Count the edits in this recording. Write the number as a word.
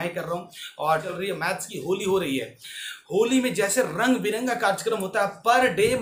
one